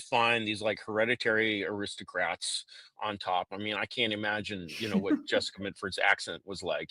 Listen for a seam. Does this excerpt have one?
no; 0 cuts

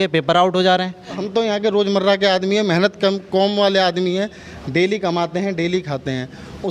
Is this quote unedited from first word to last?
no; 1 cut; at 1.2 s

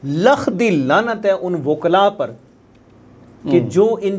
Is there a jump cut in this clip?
no; 0 cuts

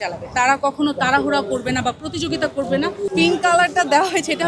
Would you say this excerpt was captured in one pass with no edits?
no; 1 cut; at 3.1 s

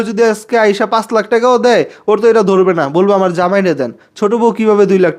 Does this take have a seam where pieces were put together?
no; 0 cuts

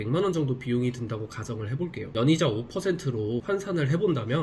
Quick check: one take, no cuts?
no; 2 cuts; at 2.1 s, 3.4 s

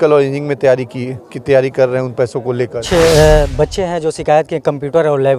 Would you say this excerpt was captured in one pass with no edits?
no; 1 cut; at 2.8 s

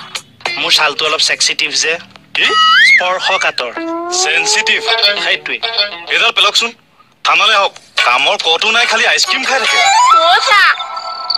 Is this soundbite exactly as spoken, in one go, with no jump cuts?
no; 1 cut; at 9.8 s

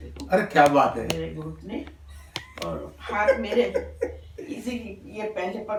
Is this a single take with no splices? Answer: yes; 0 cuts

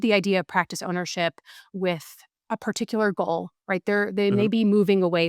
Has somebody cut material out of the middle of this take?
no; 0 cuts

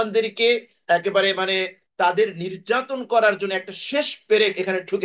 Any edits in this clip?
no; 0 cuts

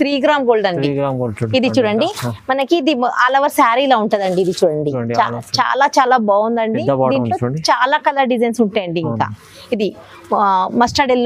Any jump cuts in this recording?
no; 0 cuts

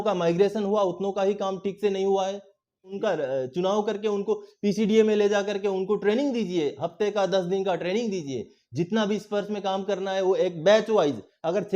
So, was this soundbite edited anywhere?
yes; 1 cut; at 2.9 s

